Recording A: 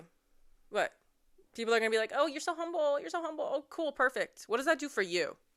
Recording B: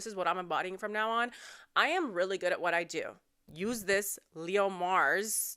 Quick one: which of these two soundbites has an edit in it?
B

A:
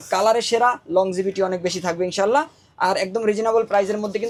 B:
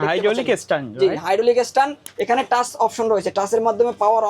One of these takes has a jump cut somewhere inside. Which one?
B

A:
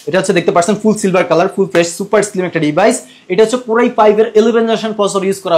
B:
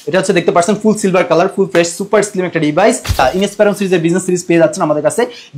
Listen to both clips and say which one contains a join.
B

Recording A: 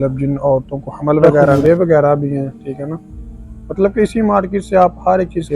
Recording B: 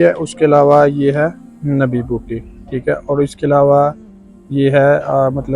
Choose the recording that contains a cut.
A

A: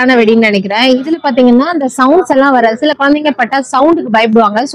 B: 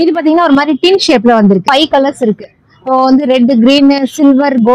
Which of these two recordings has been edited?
B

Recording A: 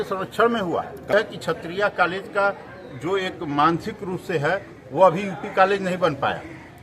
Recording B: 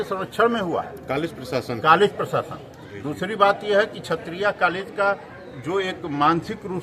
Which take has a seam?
A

